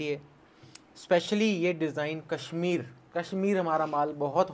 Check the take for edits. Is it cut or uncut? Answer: uncut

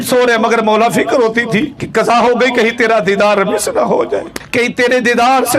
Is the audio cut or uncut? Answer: cut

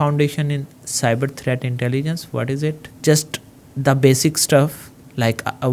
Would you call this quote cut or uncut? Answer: cut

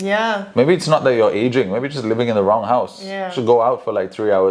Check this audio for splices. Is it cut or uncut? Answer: uncut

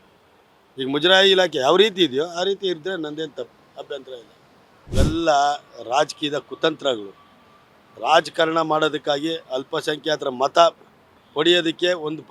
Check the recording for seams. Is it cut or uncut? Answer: cut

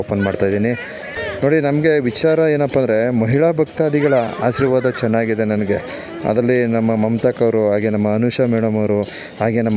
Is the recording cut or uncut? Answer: cut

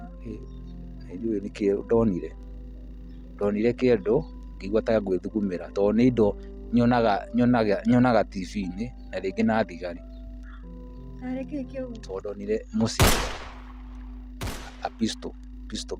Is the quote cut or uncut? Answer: uncut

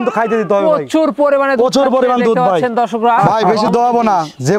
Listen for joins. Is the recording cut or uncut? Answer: cut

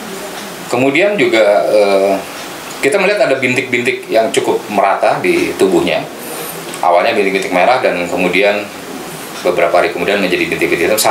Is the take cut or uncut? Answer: uncut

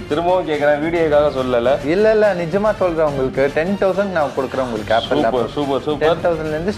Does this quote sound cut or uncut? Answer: uncut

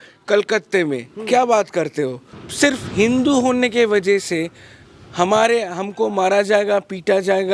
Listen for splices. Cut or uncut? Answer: cut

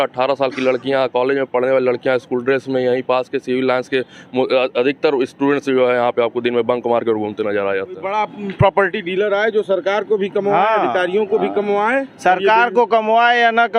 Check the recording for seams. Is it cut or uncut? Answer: cut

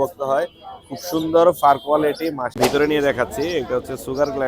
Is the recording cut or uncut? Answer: cut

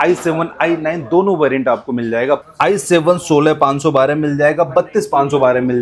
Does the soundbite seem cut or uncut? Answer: cut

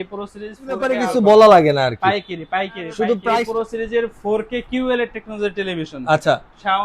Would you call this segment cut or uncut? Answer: cut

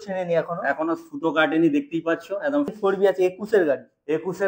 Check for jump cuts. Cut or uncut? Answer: cut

